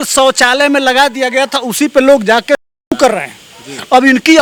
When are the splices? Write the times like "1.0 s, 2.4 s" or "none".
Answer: none